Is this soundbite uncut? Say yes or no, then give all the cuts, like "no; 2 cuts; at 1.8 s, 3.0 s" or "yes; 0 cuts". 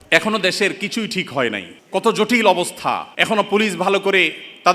no; 2 cuts; at 1.7 s, 3.1 s